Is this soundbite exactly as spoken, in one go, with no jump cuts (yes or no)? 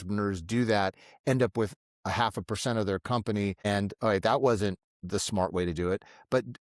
no